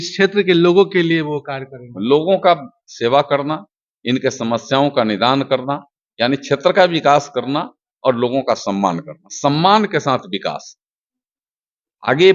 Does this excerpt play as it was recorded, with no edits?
yes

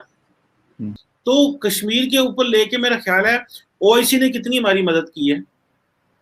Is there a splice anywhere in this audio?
yes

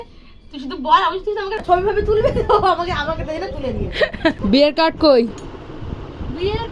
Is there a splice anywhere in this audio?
yes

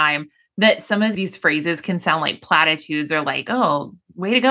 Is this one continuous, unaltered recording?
no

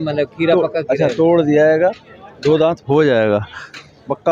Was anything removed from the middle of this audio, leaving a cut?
no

